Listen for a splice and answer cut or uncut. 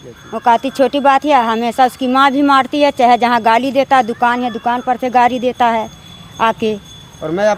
uncut